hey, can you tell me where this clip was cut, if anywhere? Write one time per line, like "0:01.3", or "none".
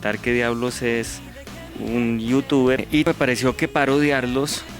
0:03.0